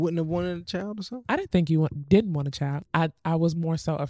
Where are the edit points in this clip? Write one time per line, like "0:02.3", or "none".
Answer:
0:02.8